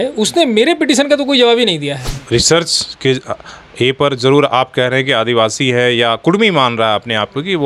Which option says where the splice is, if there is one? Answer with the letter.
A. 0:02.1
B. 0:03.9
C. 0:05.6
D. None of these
A